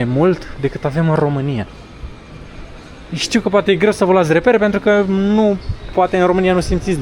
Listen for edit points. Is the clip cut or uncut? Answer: uncut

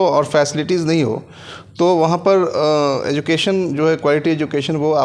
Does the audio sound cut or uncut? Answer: uncut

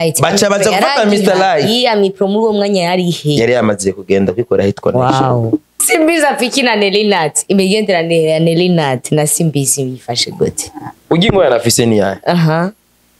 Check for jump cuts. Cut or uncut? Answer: cut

